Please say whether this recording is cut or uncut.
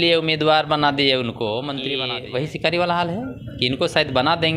cut